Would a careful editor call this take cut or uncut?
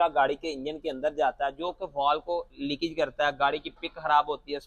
uncut